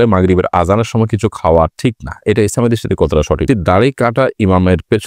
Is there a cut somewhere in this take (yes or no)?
yes